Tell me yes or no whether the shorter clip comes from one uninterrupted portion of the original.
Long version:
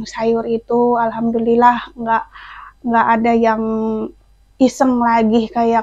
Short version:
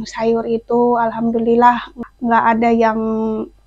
no